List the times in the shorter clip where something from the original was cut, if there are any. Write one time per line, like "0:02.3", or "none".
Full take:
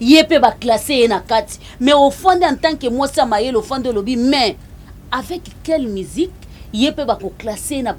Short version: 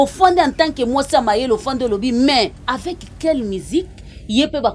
0:02.6